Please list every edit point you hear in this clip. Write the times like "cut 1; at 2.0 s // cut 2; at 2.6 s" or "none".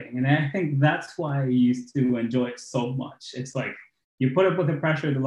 none